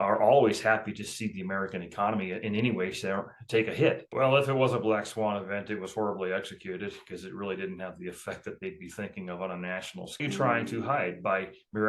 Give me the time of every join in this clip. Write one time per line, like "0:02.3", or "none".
0:04.1
0:10.2